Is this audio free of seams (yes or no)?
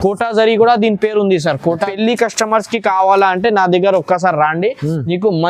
no